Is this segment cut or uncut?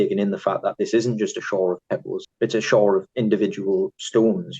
cut